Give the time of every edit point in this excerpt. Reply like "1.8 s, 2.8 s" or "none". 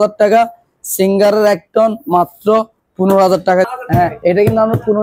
3.7 s

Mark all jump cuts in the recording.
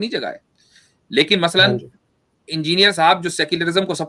none

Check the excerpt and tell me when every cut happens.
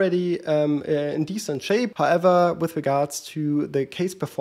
1.9 s

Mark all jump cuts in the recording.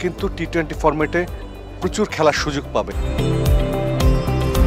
2.9 s

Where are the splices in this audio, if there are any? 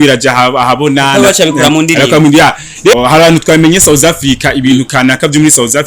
2.9 s

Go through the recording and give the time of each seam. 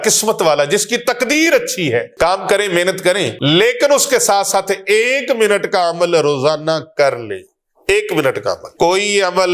2.1 s, 3.3 s, 8.7 s

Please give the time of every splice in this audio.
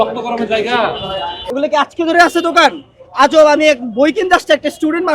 1.4 s

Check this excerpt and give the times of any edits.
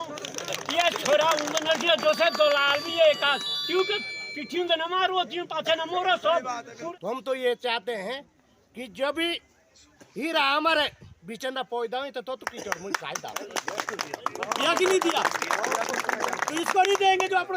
6.7 s, 14.1 s

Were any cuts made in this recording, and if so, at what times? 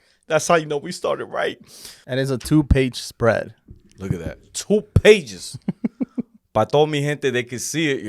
1.9 s

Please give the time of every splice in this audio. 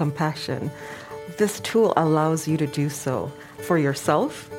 3.6 s

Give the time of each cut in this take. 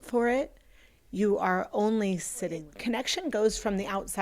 2.7 s

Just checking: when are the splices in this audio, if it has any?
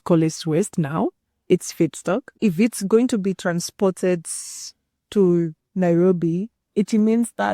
2.3 s

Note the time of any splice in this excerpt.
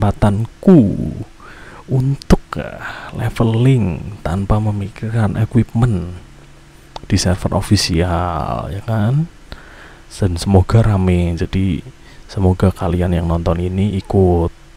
none

